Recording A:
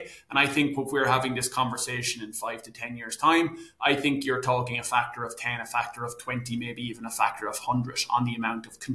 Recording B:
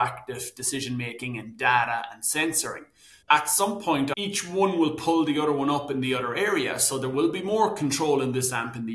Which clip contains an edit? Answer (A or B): B